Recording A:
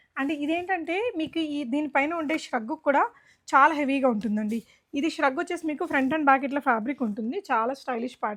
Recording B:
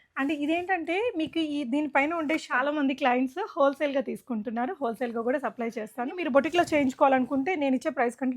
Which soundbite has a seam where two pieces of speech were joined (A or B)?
B